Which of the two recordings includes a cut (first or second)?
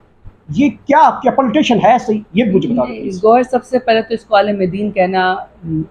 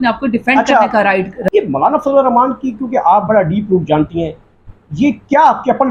second